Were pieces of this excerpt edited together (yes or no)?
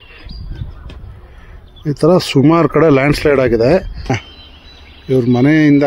yes